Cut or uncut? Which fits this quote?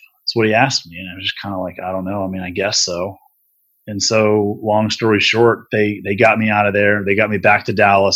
uncut